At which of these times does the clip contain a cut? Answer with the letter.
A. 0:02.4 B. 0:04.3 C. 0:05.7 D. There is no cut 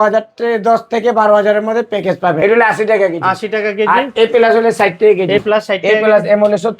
A